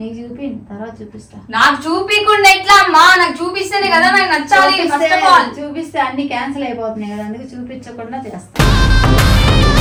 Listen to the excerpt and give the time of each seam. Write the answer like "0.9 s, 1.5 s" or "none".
none